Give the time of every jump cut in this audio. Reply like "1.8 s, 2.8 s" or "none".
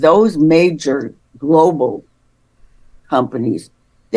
none